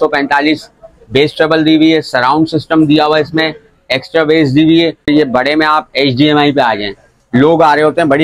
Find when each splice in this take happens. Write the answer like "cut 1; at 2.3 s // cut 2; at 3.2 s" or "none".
cut 1; at 5.1 s